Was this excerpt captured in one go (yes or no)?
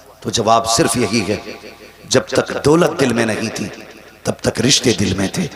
yes